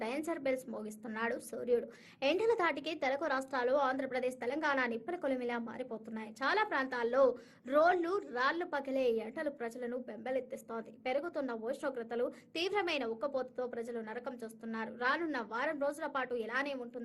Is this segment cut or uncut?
uncut